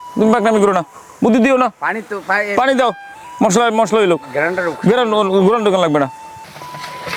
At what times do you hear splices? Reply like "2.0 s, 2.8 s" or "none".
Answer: none